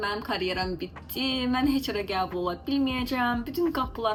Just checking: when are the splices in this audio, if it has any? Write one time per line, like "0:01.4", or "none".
none